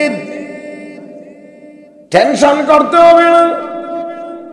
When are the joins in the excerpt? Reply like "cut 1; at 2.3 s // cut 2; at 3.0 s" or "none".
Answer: cut 1; at 1.9 s